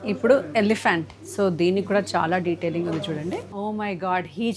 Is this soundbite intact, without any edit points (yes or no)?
no